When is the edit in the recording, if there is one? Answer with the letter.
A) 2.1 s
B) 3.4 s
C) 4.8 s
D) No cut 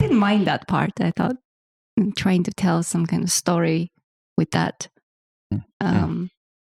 D